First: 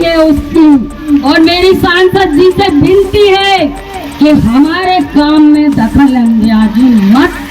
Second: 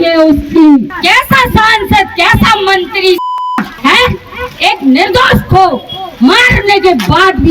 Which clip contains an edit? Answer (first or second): second